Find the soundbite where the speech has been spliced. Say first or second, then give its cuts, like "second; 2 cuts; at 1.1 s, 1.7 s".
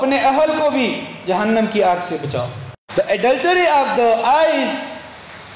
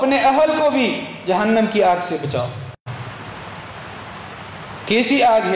first; 1 cut; at 2.8 s